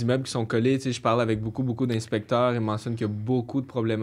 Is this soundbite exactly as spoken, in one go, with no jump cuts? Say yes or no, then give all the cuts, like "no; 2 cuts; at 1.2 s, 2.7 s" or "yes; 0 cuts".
yes; 0 cuts